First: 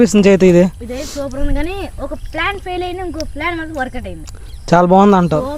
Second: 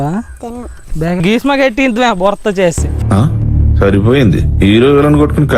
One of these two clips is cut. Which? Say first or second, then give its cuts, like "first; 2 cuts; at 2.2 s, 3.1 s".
second; 1 cut; at 1.2 s